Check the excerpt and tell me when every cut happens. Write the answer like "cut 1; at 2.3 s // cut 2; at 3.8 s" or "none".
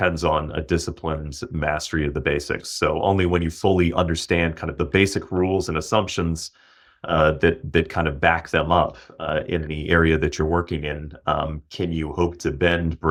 none